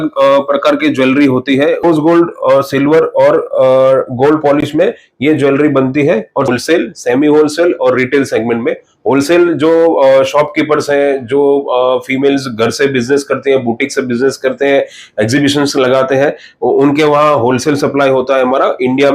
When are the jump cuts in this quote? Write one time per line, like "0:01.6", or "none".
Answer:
0:01.8
0:06.5

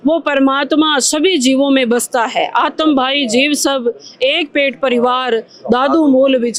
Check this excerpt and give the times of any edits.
none

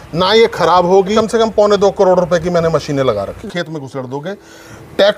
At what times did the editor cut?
0:01.1
0:03.3

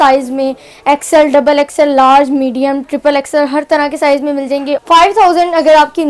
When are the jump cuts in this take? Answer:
0:04.8

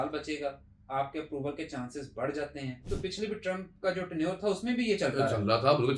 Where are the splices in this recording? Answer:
0:02.8

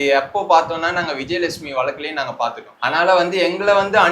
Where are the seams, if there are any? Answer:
0:02.7

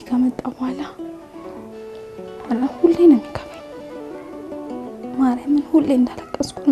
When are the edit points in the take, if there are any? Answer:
0:00.9
0:02.4
0:03.3
0:05.2

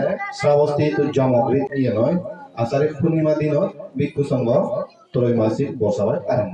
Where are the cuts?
0:01.7

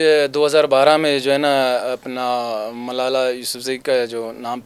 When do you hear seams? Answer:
none

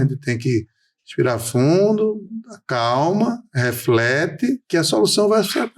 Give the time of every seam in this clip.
0:04.6

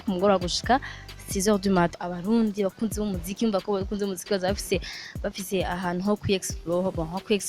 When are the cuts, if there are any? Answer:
0:01.9

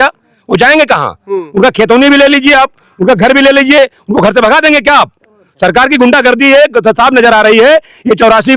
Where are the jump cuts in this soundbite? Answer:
none

